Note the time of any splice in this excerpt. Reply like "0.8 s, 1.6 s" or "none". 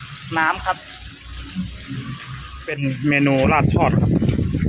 2.5 s